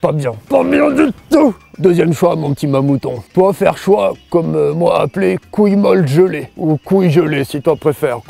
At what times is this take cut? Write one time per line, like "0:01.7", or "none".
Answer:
0:01.7
0:06.5